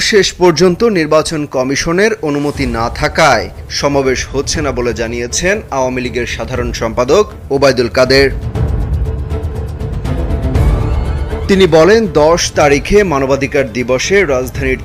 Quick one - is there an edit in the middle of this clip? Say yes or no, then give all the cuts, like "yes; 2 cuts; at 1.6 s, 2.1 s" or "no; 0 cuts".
no; 0 cuts